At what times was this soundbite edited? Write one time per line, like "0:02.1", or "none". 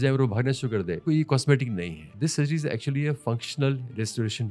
0:01.0
0:02.1